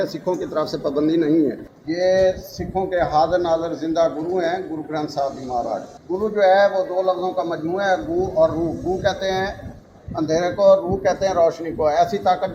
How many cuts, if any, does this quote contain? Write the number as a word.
two